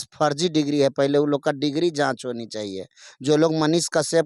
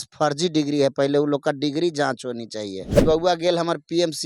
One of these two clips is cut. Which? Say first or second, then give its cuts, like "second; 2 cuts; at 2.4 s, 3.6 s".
second; 1 cut; at 3.0 s